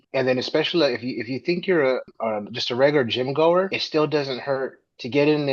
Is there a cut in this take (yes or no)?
no